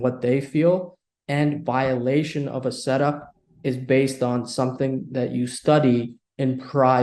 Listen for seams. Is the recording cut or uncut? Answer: uncut